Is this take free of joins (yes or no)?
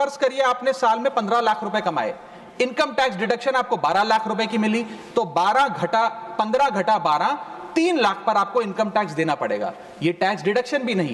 yes